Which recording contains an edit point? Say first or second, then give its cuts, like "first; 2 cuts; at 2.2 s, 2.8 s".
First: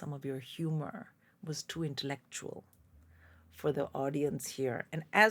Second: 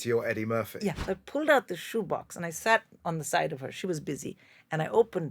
second; 1 cut; at 1.0 s